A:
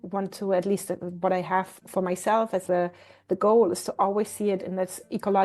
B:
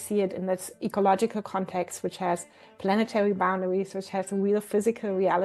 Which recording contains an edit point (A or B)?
A